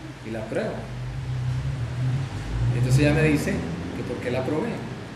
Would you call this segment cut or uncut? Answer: cut